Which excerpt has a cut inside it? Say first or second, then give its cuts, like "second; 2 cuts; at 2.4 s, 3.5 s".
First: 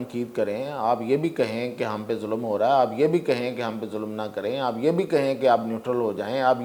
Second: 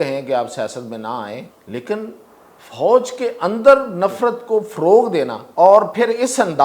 second; 2 cuts; at 1.5 s, 5.4 s